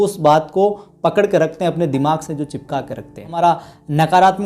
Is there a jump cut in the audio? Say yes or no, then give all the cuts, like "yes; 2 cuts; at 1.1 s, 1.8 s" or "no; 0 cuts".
yes; 1 cut; at 3.4 s